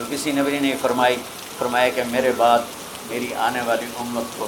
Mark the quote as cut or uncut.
uncut